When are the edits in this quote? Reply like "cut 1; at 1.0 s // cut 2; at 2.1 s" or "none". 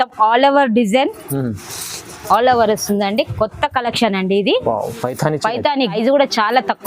cut 1; at 5.9 s